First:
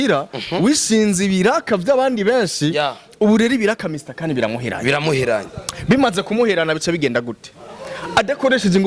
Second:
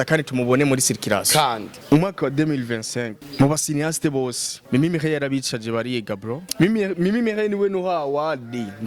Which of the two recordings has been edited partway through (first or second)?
second